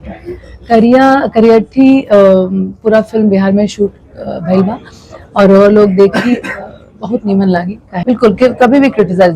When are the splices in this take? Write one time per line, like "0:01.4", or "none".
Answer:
0:07.9